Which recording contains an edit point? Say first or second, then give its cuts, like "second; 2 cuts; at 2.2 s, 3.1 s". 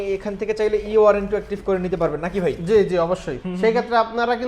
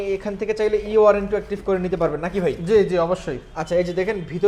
first; 1 cut; at 3.4 s